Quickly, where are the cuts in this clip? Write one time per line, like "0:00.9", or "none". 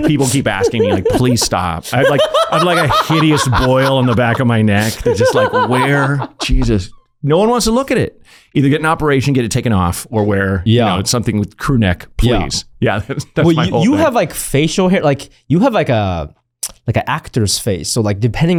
none